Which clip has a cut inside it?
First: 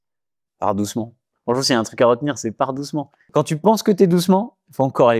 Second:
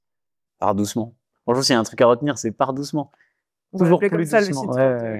first; 1 cut; at 3.2 s

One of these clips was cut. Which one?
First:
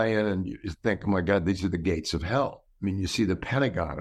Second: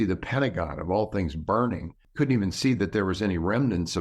second; 1 cut; at 2.0 s

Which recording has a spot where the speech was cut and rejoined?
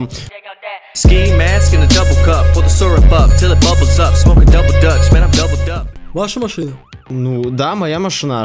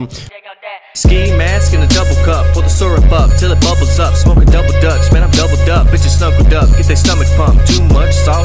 first; 1 cut; at 5.8 s

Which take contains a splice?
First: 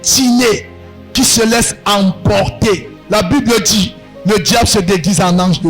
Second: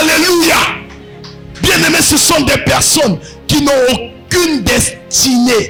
first; 1 cut; at 2.9 s

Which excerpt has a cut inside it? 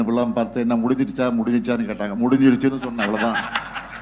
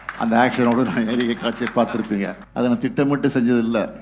second; 1 cut; at 2.4 s

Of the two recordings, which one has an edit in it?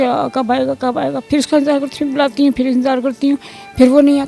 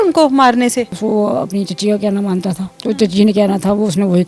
second; 2 cuts; at 1.0 s, 2.7 s

